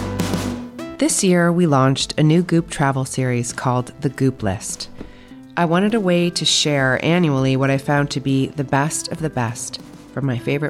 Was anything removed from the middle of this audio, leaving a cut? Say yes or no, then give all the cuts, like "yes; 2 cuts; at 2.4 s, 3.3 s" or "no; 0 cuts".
yes; 1 cut; at 0.9 s